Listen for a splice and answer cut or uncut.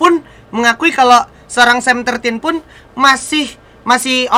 uncut